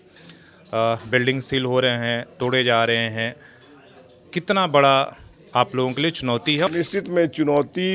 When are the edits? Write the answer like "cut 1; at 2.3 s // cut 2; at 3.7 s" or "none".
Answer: cut 1; at 6.7 s